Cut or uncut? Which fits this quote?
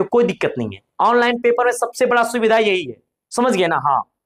uncut